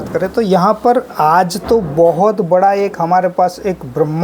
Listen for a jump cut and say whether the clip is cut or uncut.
uncut